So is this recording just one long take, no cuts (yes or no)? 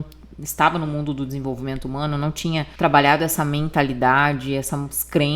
no